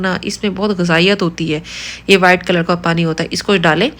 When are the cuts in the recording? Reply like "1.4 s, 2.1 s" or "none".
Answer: none